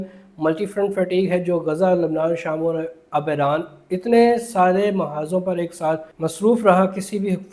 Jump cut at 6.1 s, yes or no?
yes